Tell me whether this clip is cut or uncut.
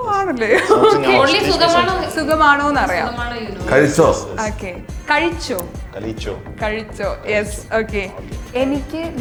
uncut